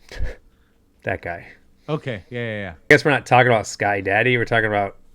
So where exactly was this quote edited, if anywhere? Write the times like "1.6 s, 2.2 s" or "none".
2.9 s